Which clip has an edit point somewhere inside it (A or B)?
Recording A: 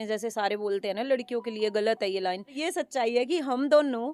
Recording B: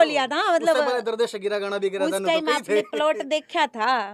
A